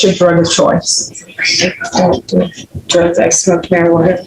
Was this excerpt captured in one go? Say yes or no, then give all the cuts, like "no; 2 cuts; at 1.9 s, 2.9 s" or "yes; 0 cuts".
yes; 0 cuts